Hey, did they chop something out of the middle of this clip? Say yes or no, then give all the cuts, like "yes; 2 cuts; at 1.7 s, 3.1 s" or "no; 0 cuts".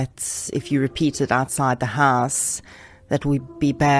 no; 0 cuts